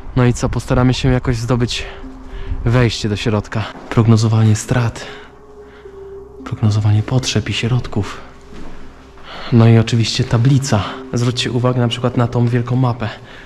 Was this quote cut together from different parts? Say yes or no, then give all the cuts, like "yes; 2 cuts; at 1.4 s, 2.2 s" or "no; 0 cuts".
yes; 2 cuts; at 3.7 s, 11.0 s